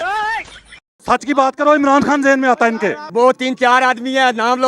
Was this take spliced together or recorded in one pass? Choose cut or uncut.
cut